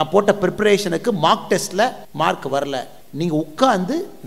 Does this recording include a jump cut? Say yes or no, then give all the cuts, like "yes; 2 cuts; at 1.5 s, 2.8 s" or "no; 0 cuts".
yes; 2 cuts; at 2.0 s, 3.0 s